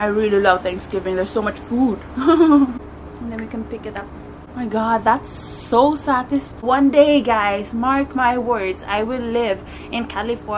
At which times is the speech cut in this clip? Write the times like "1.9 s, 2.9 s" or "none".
2.8 s, 4.4 s, 6.6 s